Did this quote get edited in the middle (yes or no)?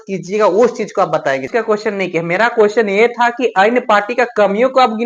yes